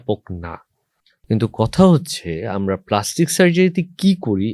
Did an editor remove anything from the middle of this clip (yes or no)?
yes